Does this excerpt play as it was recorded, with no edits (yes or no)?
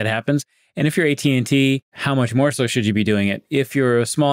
no